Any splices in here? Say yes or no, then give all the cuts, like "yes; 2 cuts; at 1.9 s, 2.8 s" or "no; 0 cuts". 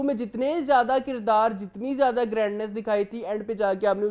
no; 0 cuts